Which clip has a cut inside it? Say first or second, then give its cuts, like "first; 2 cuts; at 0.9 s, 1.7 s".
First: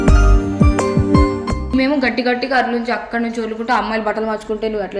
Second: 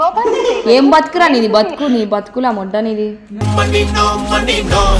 first; 1 cut; at 1.7 s